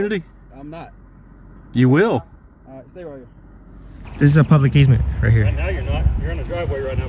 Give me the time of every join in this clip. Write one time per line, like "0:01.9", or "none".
0:04.0

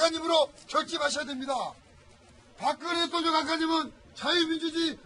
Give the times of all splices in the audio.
none

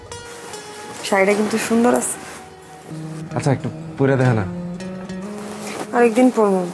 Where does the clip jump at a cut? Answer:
0:02.9

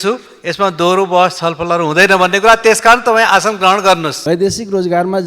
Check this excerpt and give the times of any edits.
0:04.2

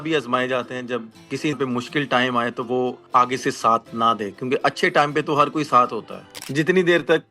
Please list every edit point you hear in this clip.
0:06.3

